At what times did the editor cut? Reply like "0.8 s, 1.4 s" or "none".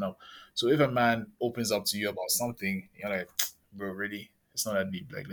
none